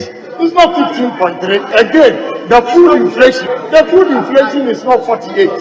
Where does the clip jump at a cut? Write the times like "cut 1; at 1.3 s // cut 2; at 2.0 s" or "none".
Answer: cut 1; at 1.7 s // cut 2; at 3.5 s